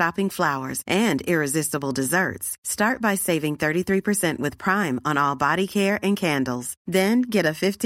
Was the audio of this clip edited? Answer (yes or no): no